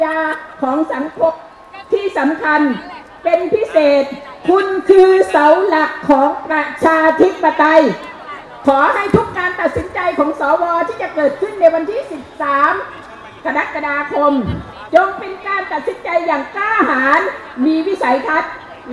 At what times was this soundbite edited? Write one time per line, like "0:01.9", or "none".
none